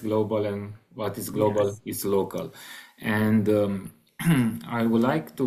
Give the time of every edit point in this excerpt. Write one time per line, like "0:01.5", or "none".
none